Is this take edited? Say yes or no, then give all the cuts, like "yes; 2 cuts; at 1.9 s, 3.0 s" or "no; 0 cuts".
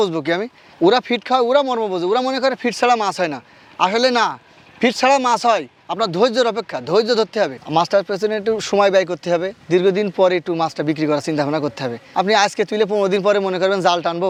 no; 0 cuts